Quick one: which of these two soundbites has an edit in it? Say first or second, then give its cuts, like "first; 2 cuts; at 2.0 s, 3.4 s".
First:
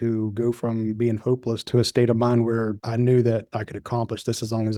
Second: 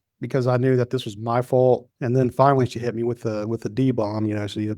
second; 1 cut; at 1.9 s